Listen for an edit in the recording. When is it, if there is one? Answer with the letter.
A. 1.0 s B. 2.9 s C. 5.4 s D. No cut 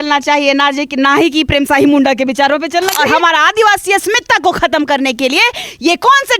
B